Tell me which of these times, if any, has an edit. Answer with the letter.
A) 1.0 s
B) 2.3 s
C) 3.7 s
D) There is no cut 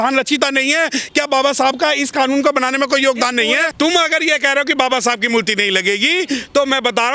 C